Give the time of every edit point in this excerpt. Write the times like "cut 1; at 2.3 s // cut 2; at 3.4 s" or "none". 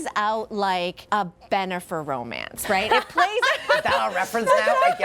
cut 1; at 1.0 s